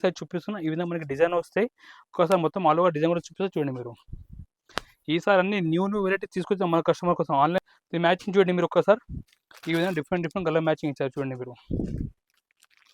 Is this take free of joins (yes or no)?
no